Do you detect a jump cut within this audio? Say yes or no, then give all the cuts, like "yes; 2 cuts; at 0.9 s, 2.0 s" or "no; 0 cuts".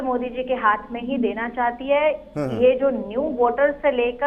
no; 0 cuts